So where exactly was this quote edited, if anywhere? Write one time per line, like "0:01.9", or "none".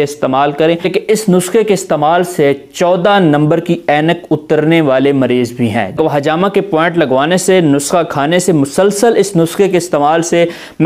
0:00.9
0:06.0